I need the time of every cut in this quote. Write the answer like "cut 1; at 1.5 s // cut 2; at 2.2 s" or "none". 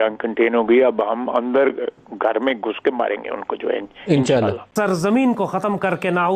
cut 1; at 4.8 s